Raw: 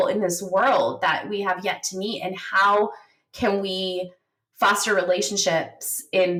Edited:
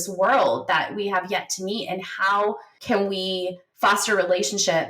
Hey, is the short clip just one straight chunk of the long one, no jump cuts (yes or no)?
no